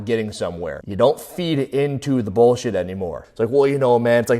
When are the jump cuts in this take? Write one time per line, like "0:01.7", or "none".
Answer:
0:03.2